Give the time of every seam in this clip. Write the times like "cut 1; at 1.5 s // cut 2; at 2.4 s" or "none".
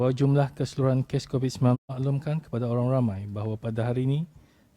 cut 1; at 1.9 s